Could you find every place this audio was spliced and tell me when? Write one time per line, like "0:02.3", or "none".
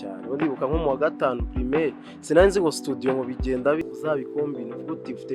0:03.8